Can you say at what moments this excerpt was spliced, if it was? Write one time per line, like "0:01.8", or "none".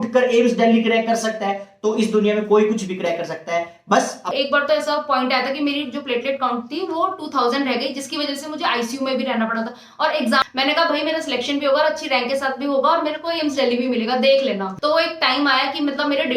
0:04.2
0:10.4
0:14.7